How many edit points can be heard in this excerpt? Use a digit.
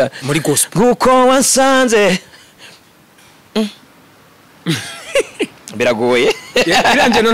0